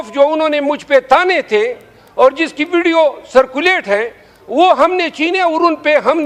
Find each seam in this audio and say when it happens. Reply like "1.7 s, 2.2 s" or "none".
none